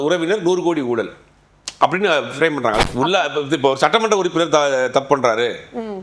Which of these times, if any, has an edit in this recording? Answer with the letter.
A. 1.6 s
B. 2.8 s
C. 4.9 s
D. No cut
B